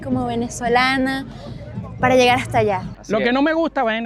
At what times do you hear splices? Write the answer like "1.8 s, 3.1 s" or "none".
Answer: 2.9 s